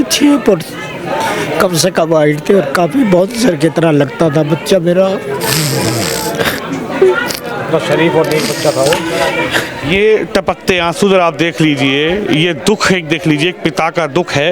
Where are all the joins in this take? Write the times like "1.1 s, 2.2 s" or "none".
none